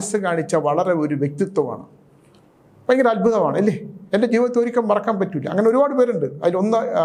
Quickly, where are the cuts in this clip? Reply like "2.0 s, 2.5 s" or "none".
none